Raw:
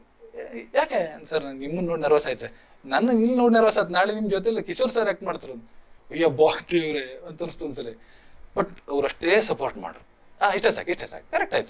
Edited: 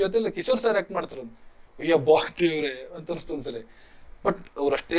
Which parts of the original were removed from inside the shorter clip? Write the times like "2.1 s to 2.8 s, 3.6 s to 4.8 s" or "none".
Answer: none